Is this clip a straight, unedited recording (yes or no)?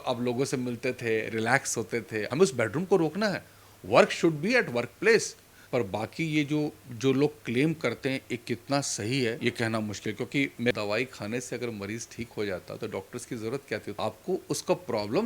no